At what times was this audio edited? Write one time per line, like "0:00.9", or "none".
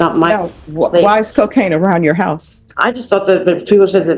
0:02.6